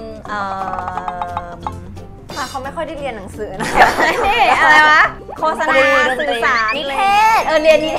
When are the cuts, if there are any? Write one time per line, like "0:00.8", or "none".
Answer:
none